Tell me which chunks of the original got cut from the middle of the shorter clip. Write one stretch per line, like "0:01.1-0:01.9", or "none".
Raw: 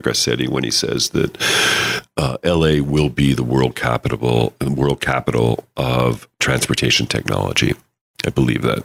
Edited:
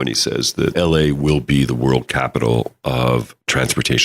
0:01.3-0:02.4
0:03.8-0:05.0